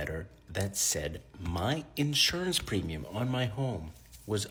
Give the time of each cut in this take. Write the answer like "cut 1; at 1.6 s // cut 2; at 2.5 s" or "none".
none

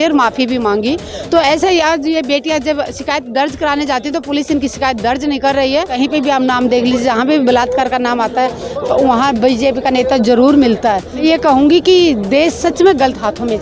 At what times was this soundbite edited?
cut 1; at 5.9 s // cut 2; at 11.1 s

